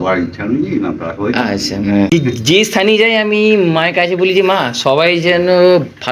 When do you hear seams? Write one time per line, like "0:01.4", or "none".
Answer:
0:02.1